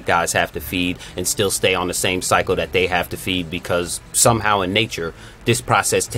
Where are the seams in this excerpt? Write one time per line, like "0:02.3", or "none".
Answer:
none